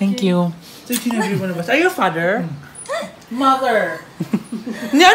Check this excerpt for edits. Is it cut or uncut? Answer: uncut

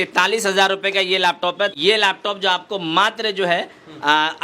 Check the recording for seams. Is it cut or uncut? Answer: cut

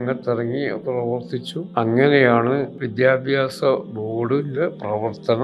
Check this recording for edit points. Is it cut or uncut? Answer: cut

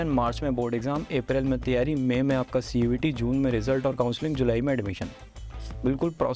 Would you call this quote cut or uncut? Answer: uncut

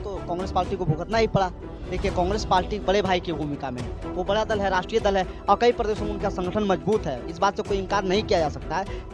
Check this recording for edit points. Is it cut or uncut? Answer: uncut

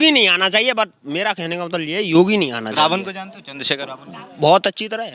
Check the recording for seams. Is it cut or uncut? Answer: uncut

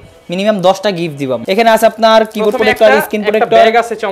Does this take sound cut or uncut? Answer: cut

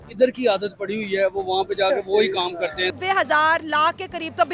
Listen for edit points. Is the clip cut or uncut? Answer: cut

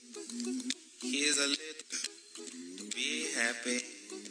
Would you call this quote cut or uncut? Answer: cut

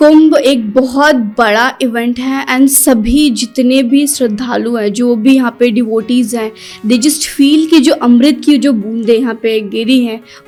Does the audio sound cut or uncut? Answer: uncut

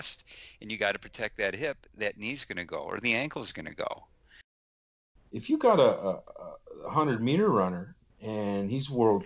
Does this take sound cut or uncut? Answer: cut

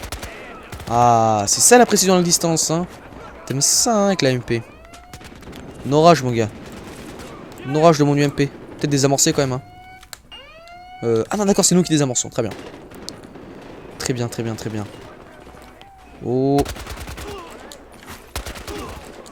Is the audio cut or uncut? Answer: uncut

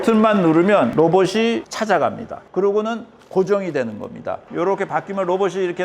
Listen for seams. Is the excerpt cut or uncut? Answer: cut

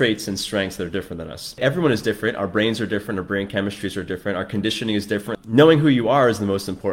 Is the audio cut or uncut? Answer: cut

